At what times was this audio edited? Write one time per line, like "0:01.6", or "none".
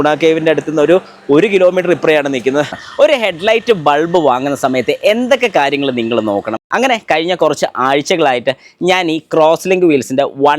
0:02.7
0:06.6